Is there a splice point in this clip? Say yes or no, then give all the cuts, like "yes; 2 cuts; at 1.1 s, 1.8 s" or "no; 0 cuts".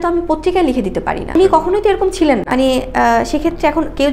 no; 0 cuts